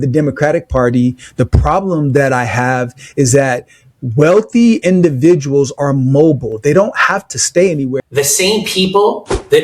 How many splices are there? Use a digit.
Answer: 1